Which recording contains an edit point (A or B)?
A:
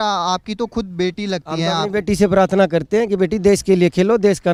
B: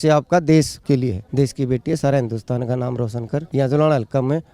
B